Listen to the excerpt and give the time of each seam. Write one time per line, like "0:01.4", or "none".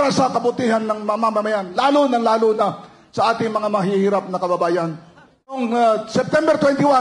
0:05.6